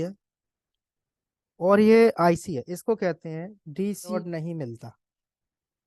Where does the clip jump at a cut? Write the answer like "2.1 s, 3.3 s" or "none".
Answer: 4.2 s